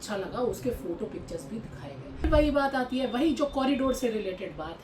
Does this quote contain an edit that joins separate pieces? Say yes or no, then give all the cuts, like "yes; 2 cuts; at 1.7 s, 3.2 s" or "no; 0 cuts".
yes; 1 cut; at 2.2 s